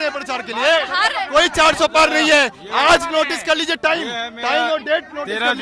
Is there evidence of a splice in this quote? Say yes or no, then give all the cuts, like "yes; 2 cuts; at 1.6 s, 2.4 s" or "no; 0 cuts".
no; 0 cuts